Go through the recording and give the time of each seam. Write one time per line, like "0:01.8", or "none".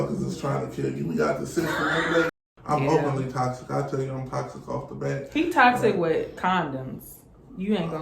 0:02.3